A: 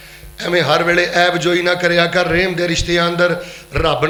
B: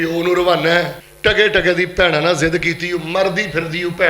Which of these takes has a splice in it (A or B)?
B